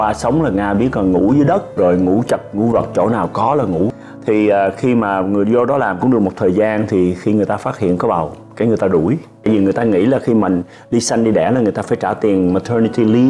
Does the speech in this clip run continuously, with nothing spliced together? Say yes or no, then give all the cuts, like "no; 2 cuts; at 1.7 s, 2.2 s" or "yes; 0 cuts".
no; 1 cut; at 4.0 s